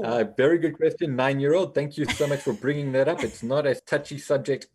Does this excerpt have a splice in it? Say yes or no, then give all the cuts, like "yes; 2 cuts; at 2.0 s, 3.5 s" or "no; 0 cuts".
yes; 1 cut; at 3.8 s